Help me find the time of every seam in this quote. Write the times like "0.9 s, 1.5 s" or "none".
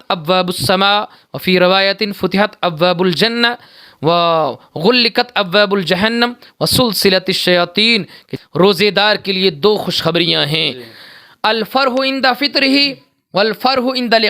8.2 s